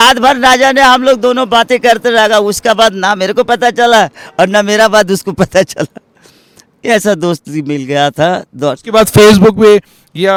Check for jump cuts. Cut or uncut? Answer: uncut